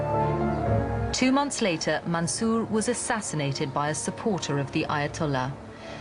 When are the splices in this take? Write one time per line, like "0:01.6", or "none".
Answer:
0:02.7